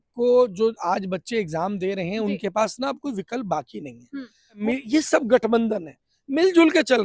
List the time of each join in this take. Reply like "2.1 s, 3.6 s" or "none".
4.6 s